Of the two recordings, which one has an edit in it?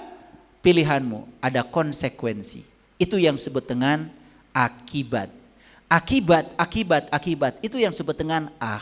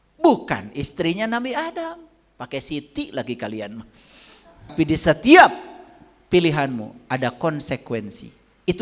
second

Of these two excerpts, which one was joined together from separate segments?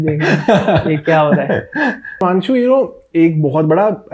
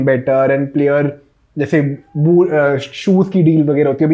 first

